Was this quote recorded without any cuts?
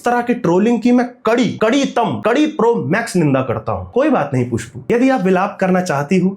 no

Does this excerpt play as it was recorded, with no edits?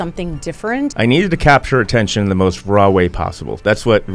no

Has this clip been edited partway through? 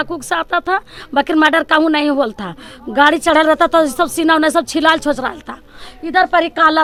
no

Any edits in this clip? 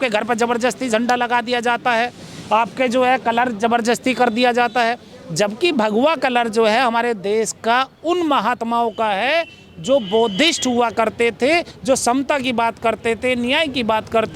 no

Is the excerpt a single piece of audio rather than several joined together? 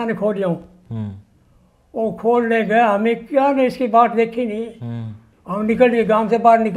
no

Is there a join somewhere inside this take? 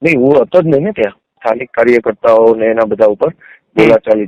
yes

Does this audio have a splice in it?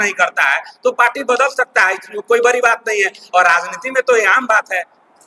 no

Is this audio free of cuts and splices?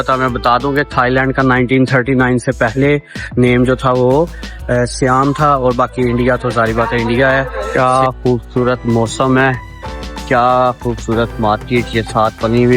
no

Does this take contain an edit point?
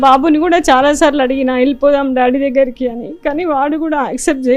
no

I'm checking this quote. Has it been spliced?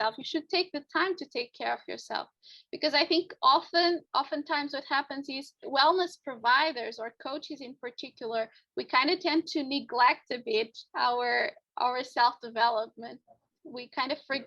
yes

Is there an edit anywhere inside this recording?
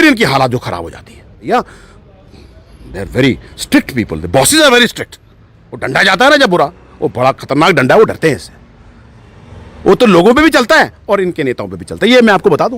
yes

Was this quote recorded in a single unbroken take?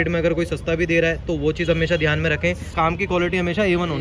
no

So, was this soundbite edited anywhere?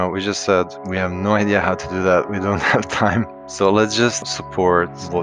yes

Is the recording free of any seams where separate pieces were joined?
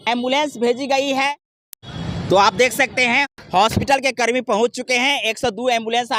yes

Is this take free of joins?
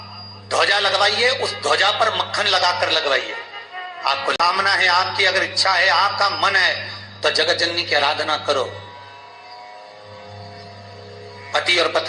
no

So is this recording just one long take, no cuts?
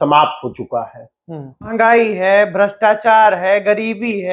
no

